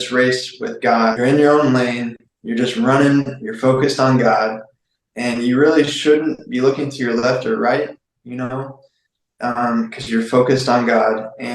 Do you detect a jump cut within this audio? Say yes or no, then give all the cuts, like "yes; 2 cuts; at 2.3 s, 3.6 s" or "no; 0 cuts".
yes; 1 cut; at 1.2 s